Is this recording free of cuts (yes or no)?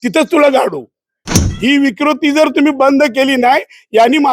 no